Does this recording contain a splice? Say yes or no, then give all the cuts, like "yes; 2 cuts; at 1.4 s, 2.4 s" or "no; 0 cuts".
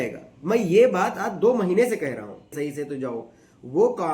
yes; 1 cut; at 2.5 s